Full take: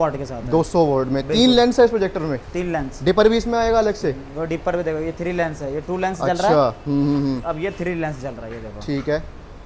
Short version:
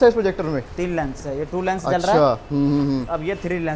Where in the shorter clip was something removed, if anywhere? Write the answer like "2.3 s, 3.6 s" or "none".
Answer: 1.2 s